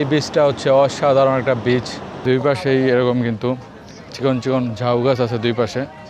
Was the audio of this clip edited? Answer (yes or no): yes